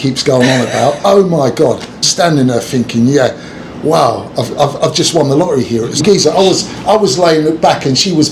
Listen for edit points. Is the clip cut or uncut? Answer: cut